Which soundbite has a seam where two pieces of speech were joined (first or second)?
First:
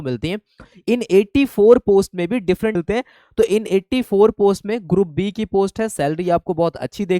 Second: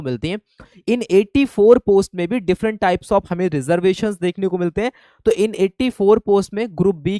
first